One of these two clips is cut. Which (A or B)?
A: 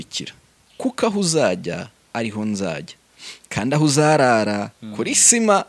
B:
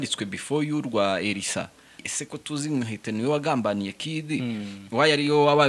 B